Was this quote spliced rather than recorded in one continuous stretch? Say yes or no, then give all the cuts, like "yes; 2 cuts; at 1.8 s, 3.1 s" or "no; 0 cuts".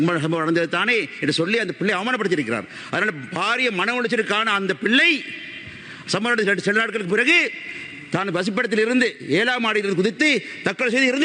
no; 0 cuts